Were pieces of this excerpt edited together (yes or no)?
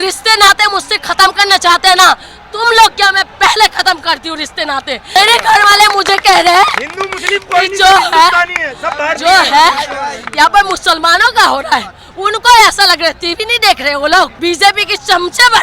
yes